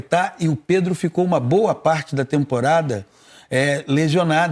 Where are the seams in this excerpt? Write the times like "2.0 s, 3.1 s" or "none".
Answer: none